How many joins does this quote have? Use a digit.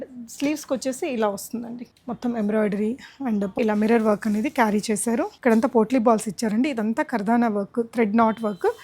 3